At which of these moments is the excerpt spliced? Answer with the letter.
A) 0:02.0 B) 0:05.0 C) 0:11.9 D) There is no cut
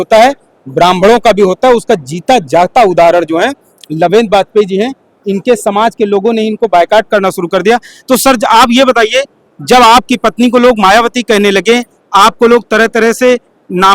D